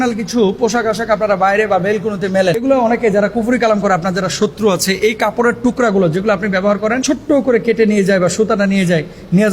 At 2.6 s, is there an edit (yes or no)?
yes